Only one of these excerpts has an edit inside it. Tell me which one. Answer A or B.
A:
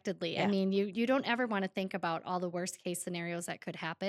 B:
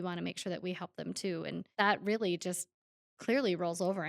B